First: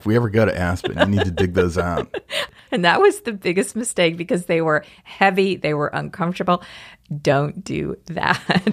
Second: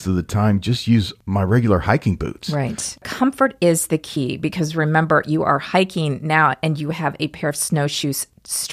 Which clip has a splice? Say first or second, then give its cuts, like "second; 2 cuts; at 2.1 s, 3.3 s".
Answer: second; 2 cuts; at 1.2 s, 2.9 s